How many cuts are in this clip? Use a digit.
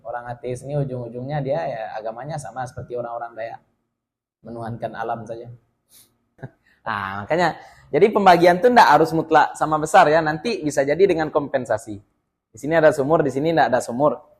1